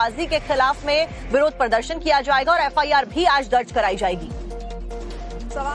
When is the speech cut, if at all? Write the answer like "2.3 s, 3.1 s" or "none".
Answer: 4.1 s